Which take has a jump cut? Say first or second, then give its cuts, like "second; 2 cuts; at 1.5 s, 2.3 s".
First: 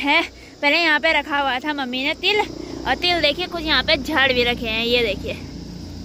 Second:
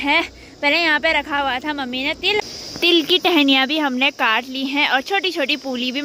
second; 1 cut; at 2.4 s